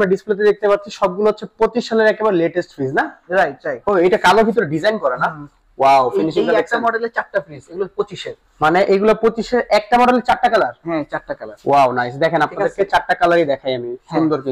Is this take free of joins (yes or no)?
no